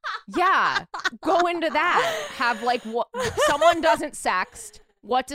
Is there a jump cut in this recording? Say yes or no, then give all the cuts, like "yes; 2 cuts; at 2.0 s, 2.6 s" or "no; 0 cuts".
no; 0 cuts